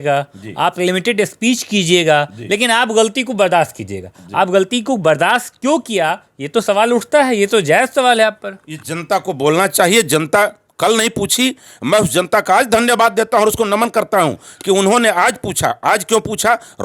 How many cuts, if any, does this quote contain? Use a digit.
0